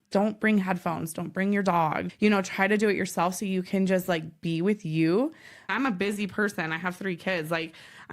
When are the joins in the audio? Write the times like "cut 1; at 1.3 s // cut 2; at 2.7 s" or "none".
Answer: cut 1; at 2.0 s // cut 2; at 5.7 s